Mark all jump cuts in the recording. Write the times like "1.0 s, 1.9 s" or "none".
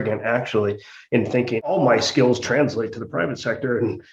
1.7 s